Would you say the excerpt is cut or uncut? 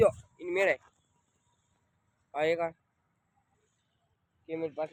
uncut